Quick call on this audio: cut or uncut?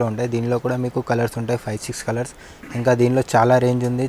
uncut